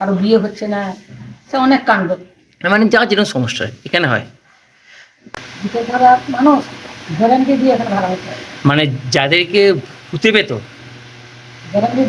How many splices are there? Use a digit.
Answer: 1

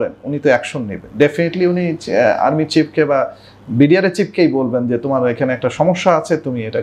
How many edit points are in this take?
0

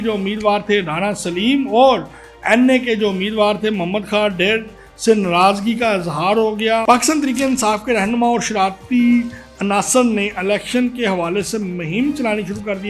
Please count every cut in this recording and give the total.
1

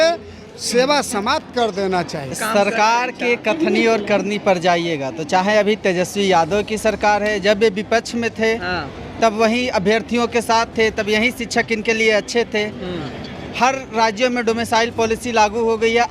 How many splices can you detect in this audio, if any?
1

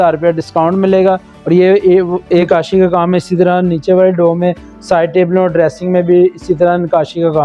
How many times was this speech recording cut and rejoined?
1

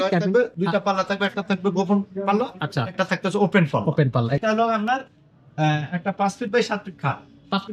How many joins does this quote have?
1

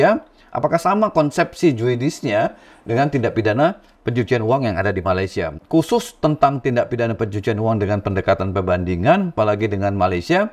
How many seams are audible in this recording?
1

